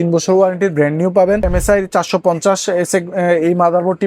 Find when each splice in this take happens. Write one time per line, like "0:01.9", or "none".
0:01.5